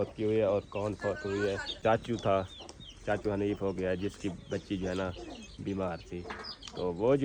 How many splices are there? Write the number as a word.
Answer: one